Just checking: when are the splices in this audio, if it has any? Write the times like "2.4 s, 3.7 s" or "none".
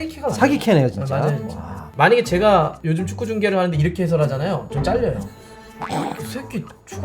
1.9 s